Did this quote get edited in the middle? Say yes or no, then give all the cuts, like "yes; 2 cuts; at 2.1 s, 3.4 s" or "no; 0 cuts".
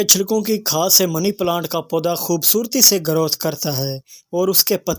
no; 0 cuts